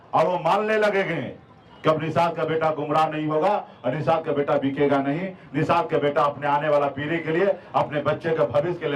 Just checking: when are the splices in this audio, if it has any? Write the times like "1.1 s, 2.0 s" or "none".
none